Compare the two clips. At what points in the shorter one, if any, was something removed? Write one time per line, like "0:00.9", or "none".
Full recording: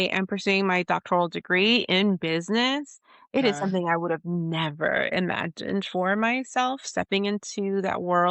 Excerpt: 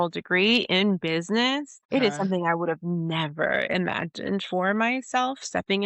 0:01.7